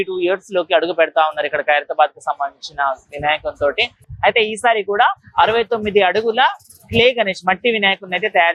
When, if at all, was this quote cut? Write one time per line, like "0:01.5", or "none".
none